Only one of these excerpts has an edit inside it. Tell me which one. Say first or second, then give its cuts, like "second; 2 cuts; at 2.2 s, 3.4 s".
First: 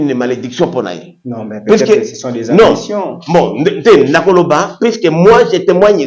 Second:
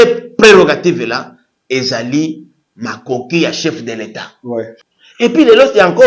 second; 1 cut; at 4.8 s